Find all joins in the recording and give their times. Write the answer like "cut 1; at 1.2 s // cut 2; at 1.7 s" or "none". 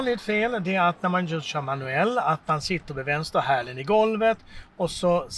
none